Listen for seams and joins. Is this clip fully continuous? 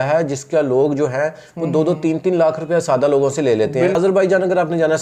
no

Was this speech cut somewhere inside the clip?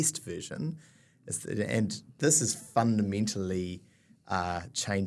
yes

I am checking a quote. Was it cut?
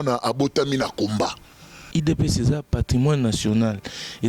yes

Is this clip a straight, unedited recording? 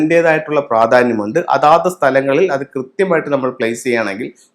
yes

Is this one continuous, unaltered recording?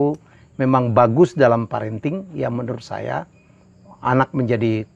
yes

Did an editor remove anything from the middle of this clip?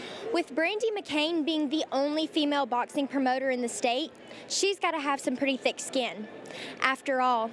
no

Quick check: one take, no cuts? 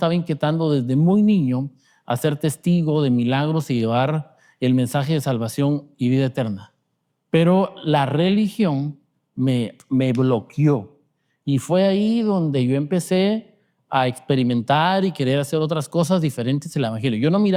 yes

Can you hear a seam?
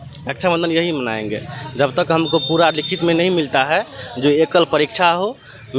no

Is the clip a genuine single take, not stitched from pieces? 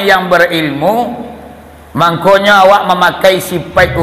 yes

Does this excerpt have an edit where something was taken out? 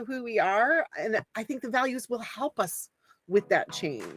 yes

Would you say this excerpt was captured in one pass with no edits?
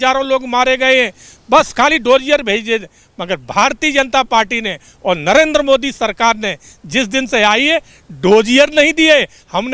yes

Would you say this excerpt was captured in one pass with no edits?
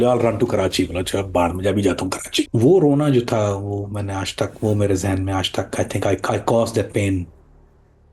no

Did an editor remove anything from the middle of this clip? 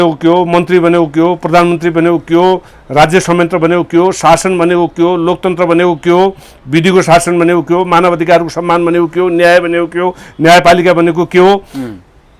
no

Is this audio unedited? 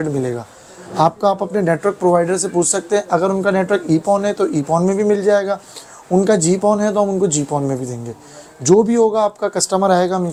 yes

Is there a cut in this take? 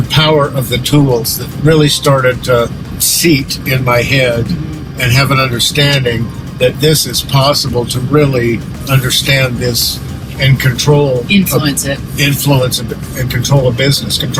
no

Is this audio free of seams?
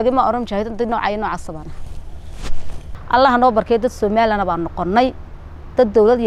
no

